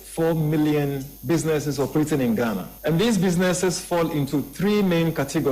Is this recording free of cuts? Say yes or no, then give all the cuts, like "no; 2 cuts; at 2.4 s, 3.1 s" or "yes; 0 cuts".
no; 2 cuts; at 1.1 s, 2.7 s